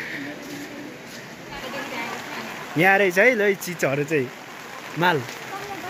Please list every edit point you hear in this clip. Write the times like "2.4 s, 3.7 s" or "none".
1.6 s